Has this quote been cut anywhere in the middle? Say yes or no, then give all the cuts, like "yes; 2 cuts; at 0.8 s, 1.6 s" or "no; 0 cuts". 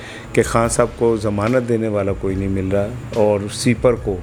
no; 0 cuts